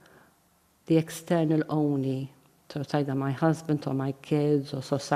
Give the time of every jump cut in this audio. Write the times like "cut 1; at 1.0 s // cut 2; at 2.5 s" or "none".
none